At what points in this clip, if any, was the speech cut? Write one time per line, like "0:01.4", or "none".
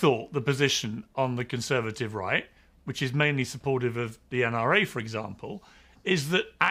none